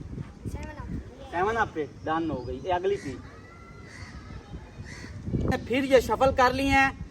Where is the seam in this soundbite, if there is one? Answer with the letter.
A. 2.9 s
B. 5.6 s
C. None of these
B